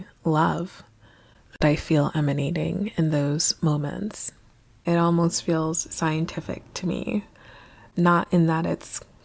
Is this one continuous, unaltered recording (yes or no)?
no